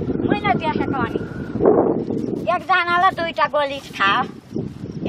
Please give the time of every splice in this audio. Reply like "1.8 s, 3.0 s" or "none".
2.0 s